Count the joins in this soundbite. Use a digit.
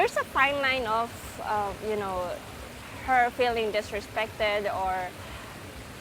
0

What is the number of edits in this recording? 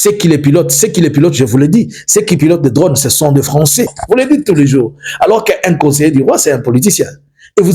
1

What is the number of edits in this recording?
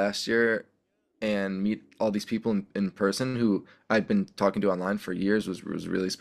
0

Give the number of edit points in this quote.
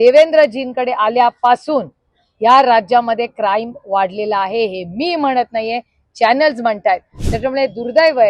1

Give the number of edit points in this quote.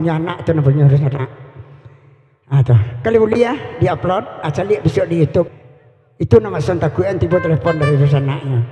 1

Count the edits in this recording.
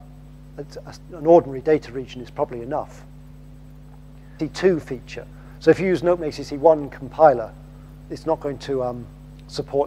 0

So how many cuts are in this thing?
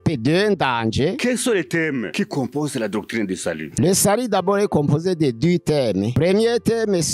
4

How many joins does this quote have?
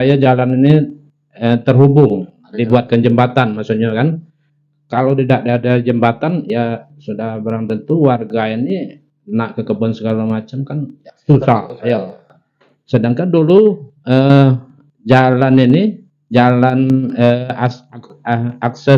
0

